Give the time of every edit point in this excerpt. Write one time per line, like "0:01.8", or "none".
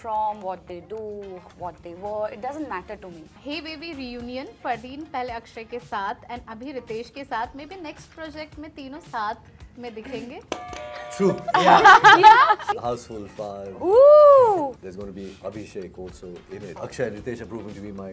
0:03.4
0:10.4
0:12.7
0:14.8
0:16.8